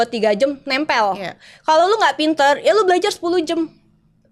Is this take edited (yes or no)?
no